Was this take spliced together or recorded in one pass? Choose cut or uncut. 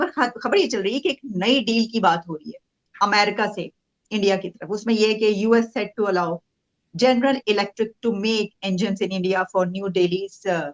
uncut